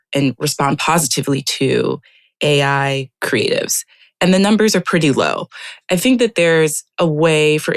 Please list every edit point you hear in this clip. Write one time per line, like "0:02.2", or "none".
none